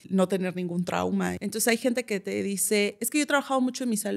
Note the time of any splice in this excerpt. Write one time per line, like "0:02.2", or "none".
0:01.4
0:03.0